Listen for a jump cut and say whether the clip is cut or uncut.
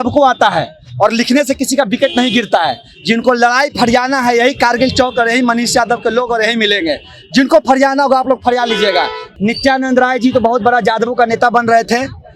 cut